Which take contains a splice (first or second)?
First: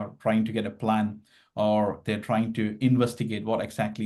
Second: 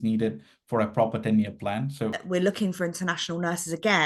second